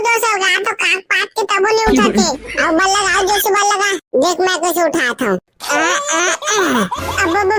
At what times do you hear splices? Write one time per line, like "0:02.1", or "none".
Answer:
none